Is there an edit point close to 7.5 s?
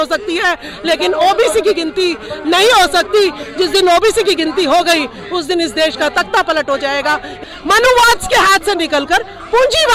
yes; 1 cut; at 7.5 s

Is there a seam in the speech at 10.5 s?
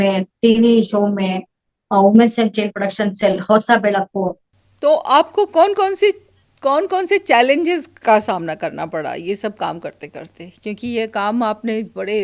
no; 1 cut; at 4.7 s

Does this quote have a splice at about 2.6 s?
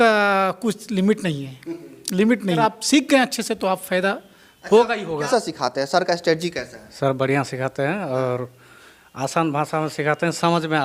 yes; 2 cuts; at 2.6 s, 5.3 s

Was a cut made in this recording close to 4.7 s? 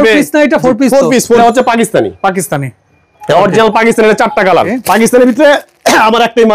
yes; 2 cuts; at 1.4 s, 4.7 s

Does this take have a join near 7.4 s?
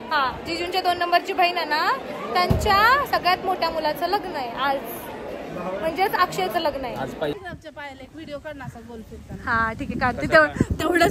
yes; 1 cut; at 7.4 s

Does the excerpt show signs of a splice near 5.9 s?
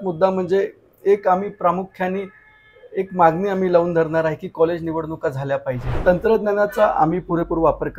yes; 1 cut; at 5.9 s

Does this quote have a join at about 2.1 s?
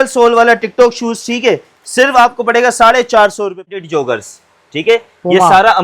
no; 1 cut; at 3.7 s

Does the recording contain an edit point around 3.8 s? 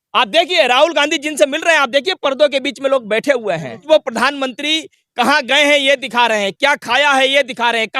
yes; 1 cut; at 3.8 s

